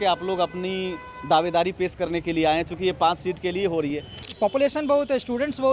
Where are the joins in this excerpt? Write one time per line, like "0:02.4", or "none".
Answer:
0:04.1